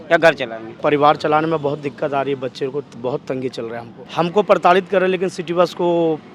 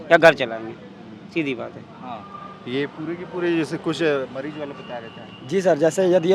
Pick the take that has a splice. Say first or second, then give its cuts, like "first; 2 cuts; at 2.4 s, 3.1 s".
first; 2 cuts; at 0.8 s, 3.9 s